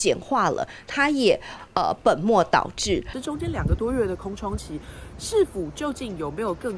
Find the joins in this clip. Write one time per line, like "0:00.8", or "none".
0:03.2